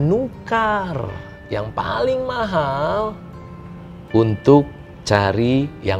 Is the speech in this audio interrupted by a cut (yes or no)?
no